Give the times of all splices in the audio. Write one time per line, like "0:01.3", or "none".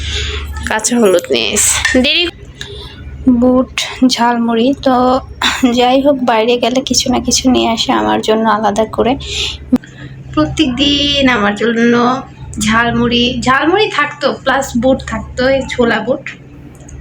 0:02.3
0:09.8